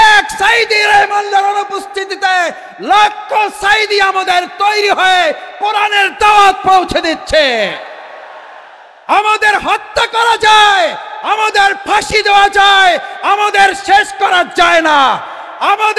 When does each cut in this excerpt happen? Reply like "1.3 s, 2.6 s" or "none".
none